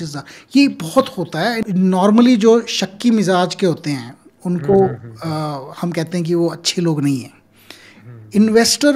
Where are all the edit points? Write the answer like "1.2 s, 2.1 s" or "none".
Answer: 1.6 s